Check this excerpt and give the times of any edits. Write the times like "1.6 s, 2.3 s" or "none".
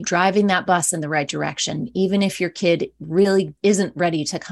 3.5 s